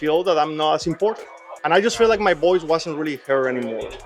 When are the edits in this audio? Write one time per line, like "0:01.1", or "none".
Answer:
0:01.4

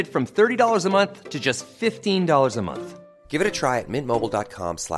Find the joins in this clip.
none

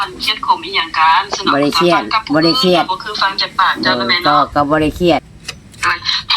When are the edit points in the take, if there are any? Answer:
0:05.3

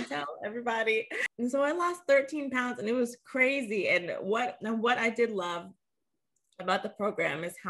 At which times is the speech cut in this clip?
0:01.2

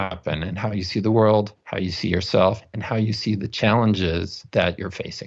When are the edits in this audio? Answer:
0:04.3

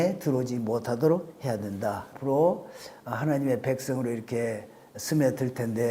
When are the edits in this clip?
0:02.1

